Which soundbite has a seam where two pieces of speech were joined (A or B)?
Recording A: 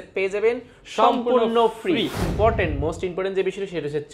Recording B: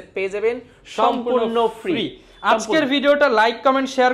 A